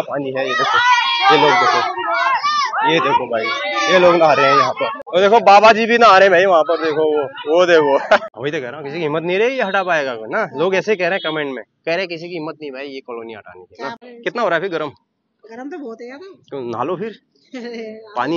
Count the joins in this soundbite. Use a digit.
3